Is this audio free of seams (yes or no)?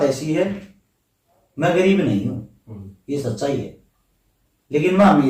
yes